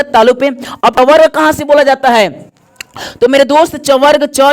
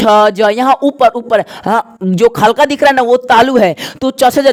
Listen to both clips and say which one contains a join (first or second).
first